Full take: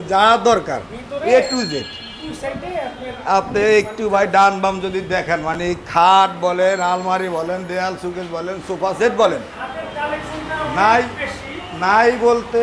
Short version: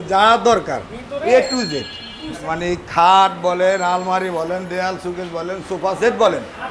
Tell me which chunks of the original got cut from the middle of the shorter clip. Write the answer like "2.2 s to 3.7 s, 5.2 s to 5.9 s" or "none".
2.5 s to 5.5 s